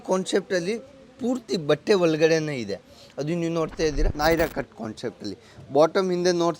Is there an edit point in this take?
yes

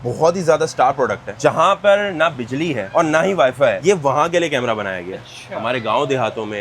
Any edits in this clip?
no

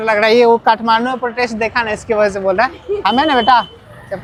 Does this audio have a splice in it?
no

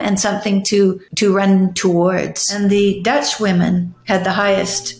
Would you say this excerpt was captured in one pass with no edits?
no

